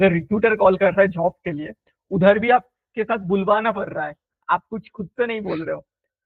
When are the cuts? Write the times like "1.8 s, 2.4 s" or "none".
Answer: none